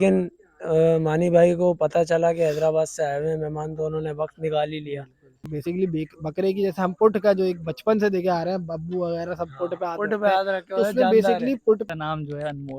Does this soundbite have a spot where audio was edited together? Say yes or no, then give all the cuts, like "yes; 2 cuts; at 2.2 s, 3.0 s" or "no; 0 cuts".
yes; 2 cuts; at 5.5 s, 11.8 s